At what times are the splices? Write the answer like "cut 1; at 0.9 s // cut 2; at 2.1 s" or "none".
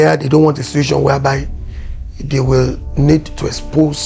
none

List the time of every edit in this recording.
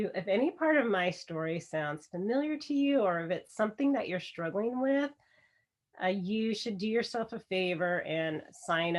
none

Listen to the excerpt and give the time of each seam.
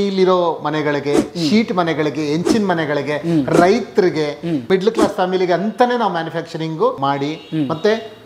none

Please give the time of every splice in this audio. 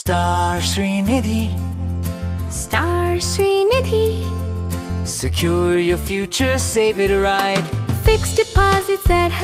none

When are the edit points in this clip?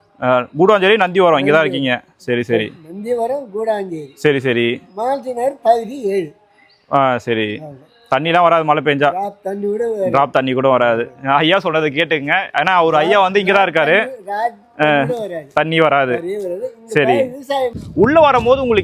cut 1; at 17.8 s

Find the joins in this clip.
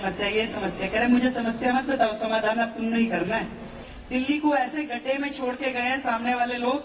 cut 1; at 3.9 s

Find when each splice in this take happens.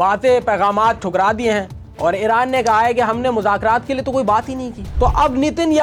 none

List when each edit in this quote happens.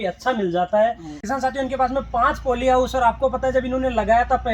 cut 1; at 1.3 s

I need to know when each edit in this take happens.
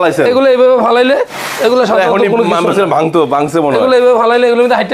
none

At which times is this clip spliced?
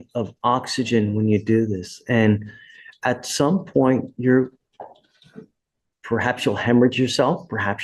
none

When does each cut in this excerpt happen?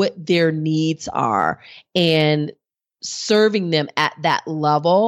none

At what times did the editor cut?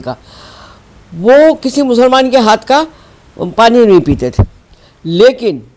none

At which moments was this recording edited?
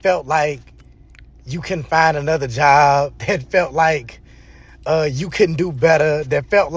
cut 1; at 3.6 s

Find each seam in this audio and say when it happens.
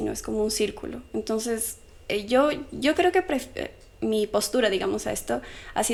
none

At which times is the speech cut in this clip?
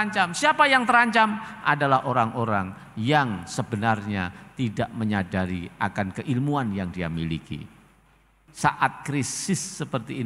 cut 1; at 8.4 s

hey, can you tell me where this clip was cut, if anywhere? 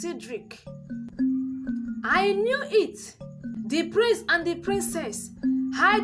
cut 1; at 1.1 s // cut 2; at 3.5 s

